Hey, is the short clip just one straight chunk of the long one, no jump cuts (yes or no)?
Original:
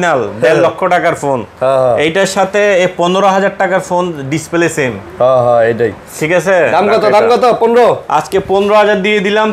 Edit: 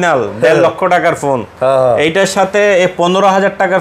yes